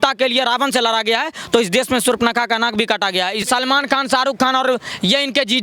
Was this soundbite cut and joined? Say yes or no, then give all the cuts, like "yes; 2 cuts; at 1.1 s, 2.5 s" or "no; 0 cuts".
yes; 1 cut; at 3.4 s